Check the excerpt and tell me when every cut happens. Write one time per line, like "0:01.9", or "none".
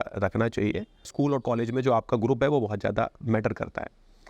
0:01.1